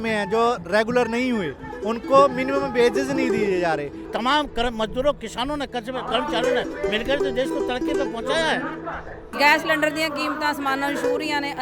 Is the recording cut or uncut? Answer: cut